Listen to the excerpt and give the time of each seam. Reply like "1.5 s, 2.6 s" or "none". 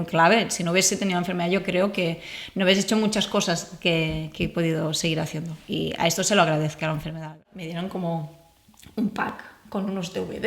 7.6 s